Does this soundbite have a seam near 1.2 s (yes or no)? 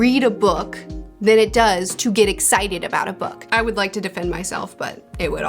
no